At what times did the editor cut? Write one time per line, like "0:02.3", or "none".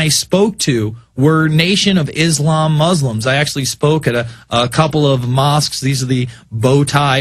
0:06.3